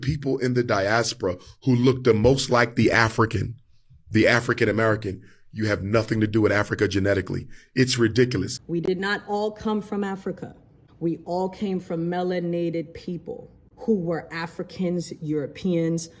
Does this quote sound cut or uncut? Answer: uncut